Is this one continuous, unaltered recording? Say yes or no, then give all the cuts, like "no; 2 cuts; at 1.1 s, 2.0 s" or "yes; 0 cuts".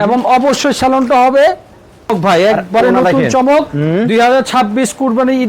no; 1 cut; at 2.1 s